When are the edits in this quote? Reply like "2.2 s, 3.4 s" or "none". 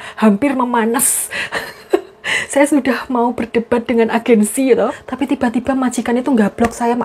5.1 s